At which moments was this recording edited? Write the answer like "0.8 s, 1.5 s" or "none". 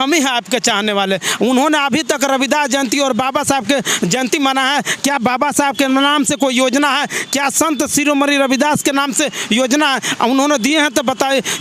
none